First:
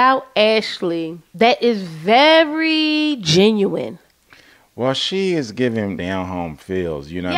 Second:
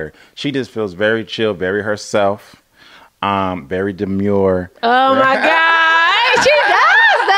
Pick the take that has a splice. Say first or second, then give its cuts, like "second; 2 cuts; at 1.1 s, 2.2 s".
first; 2 cuts; at 1.2 s, 6.0 s